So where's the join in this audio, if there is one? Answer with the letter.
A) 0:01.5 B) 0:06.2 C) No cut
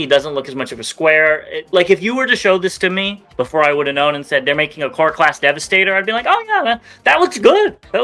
A